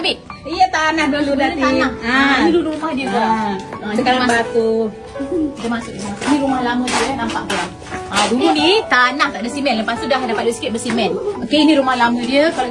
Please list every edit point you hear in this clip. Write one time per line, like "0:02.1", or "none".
none